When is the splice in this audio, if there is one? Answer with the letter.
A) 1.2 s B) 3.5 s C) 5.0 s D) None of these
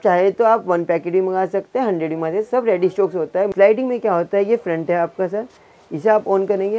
B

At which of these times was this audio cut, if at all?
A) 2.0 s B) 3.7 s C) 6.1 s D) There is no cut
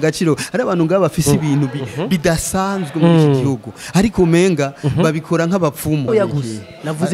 C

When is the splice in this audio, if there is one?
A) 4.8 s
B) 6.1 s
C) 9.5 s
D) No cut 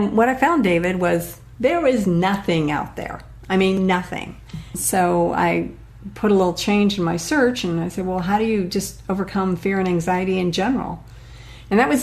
A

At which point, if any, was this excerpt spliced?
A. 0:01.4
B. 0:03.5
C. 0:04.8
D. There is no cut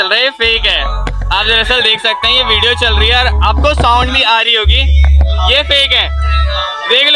D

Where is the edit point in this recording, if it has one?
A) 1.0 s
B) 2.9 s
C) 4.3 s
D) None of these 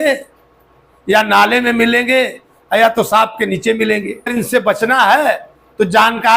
C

